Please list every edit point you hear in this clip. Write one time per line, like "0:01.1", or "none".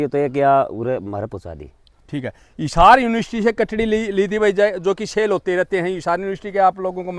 none